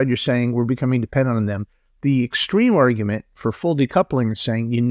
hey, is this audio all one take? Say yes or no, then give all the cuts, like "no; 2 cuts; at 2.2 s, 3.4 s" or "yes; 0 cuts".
yes; 0 cuts